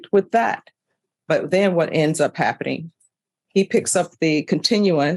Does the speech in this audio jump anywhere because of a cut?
no; 0 cuts

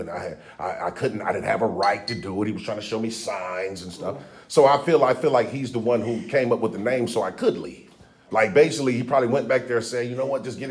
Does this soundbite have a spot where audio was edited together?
no; 0 cuts

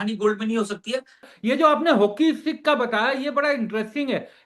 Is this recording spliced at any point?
yes; 1 cut; at 1.3 s

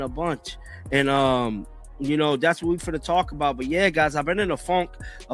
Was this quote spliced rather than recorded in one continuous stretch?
yes; 1 cut; at 4.2 s

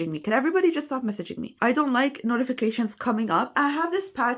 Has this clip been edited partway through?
yes; 1 cut; at 1.5 s

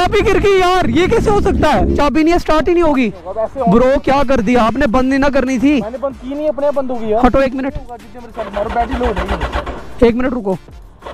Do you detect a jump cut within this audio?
yes; 1 cut; at 1.9 s

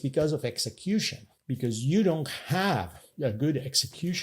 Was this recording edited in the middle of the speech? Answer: yes; 2 cuts; at 1.8 s, 3.1 s

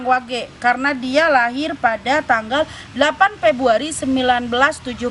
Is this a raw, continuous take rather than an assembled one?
yes; 0 cuts

